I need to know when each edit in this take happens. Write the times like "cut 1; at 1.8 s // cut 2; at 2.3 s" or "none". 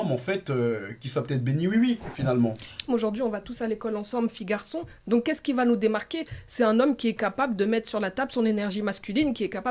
cut 1; at 2.9 s